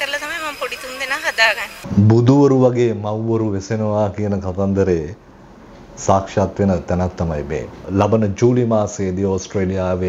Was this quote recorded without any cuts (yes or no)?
no